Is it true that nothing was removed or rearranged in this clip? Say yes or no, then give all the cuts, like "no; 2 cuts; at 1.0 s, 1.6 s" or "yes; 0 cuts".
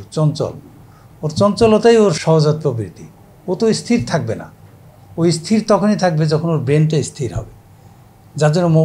no; 1 cut; at 2.2 s